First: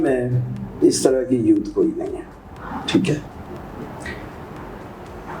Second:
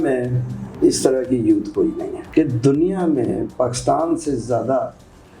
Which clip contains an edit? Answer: second; 1 cut; at 2.1 s

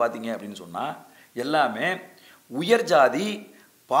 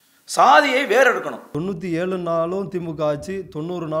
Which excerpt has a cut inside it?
second; 1 cut; at 1.4 s

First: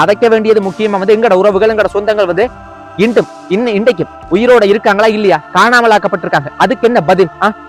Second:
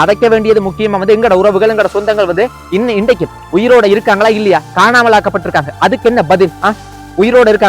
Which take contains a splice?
second; 1 cut; at 2.6 s

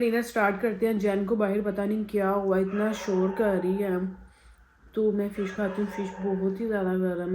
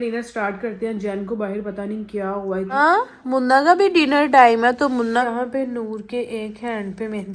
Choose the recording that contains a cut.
second; 2 cuts; at 2.7 s, 5.2 s

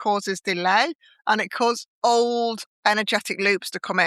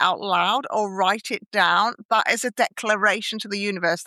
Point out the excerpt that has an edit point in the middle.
first; 2 cuts; at 1.9 s, 2.7 s

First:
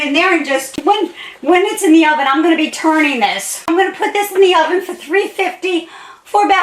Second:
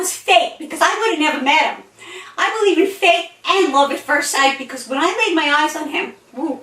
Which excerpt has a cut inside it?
first; 2 cuts; at 0.8 s, 3.6 s

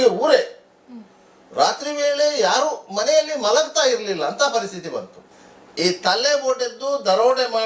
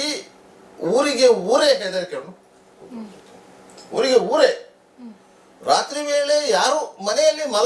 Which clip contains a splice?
first; 1 cut; at 5.2 s

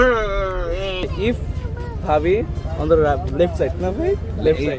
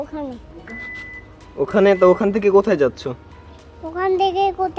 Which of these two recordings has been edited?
first; 1 cut; at 1.0 s

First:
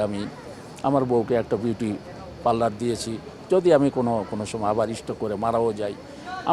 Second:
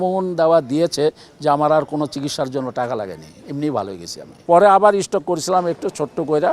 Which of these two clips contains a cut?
second; 1 cut; at 4.4 s

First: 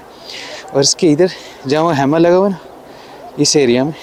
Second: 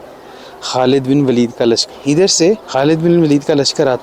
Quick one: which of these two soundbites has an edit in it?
second; 2 cuts; at 1.8 s, 2.6 s

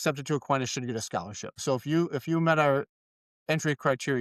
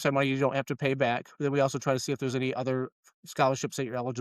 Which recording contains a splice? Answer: first; 1 cut; at 1.6 s

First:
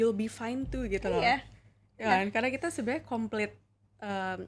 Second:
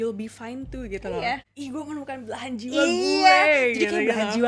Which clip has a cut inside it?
second; 1 cut; at 1.5 s

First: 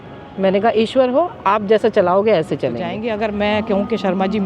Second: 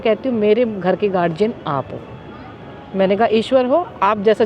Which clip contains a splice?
first; 1 cut; at 2.9 s

